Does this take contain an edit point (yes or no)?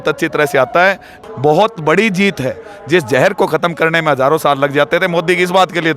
yes